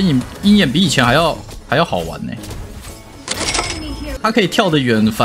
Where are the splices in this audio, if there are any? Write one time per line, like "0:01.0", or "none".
0:04.2